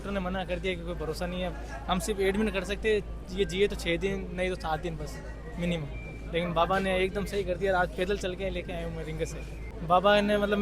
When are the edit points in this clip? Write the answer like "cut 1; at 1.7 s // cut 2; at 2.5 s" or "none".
cut 1; at 9.7 s